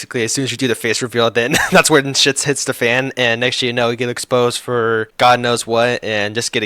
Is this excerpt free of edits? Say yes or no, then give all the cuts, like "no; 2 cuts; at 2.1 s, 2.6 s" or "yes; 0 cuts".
no; 1 cut; at 5.1 s